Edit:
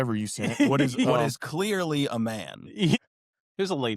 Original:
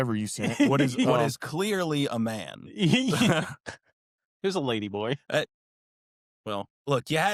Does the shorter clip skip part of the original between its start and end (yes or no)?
yes